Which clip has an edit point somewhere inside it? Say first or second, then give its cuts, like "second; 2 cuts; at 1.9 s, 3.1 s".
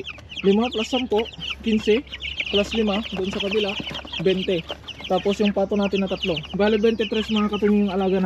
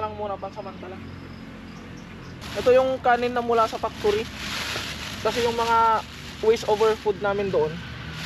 second; 1 cut; at 2.4 s